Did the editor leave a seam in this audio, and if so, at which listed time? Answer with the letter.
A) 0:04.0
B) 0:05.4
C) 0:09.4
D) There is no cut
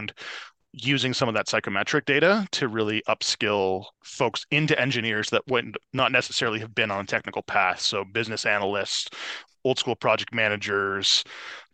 A